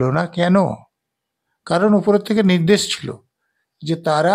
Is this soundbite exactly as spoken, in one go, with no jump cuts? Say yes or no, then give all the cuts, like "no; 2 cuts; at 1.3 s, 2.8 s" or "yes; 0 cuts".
yes; 0 cuts